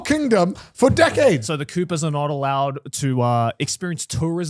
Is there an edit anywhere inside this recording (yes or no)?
yes